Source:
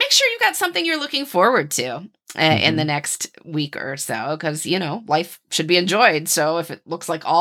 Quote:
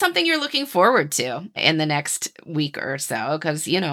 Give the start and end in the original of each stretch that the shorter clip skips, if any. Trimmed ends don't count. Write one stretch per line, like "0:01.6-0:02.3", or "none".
0:02.2-0:02.6

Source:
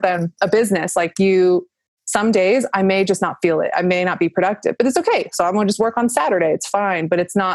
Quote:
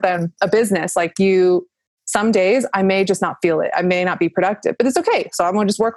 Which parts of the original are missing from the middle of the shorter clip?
none

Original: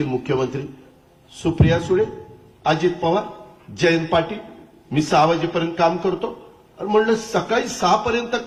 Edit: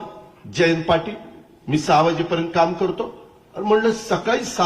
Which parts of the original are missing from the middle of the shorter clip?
none

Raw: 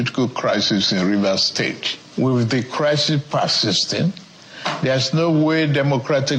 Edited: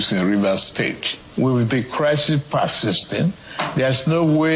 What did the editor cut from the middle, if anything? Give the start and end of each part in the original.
0:04.3-0:04.6

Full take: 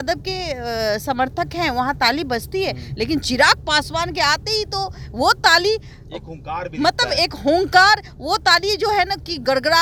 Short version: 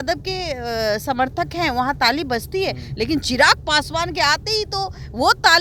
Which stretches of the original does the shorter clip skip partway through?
none

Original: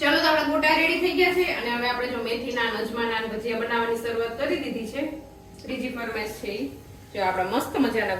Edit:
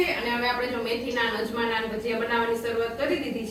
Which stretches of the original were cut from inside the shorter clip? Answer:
none

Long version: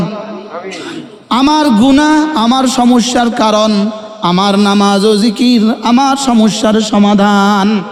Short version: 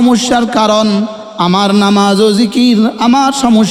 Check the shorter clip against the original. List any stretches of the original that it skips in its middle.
none

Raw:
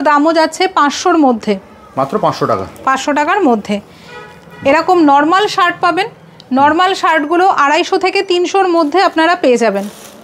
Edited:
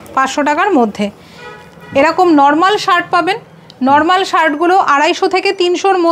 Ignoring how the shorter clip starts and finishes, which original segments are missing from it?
none

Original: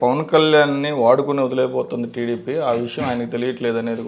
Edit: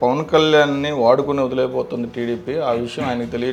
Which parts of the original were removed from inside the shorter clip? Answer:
none

